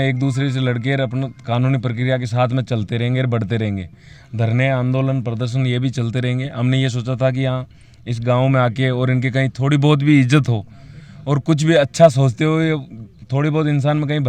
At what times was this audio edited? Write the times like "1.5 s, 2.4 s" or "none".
none